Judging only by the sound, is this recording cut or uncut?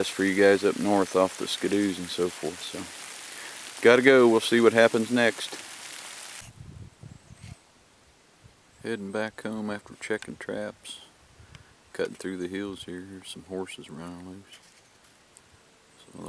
uncut